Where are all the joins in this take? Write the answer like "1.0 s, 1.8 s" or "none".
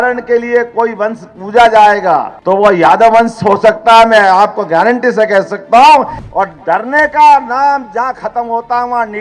2.3 s, 6.2 s

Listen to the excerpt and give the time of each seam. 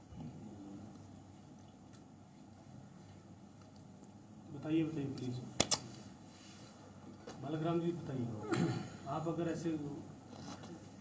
none

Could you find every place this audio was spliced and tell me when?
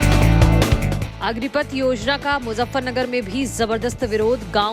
0.9 s

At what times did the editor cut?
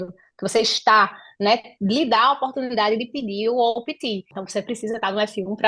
4.4 s

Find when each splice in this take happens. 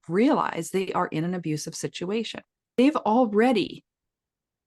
2.7 s

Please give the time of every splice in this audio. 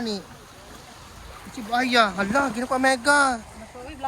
none

